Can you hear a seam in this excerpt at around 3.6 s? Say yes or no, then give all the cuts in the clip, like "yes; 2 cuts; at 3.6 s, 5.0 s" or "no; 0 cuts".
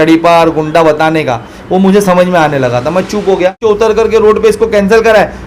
yes; 1 cut; at 3.6 s